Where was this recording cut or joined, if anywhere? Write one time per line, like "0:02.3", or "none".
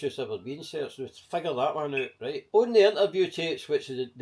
0:02.4